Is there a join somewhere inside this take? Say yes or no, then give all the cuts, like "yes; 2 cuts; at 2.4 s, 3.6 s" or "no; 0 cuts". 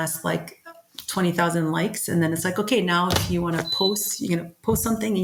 no; 0 cuts